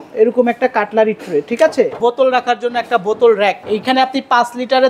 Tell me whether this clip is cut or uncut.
cut